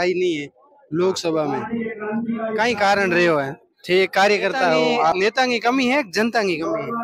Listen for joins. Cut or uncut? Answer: cut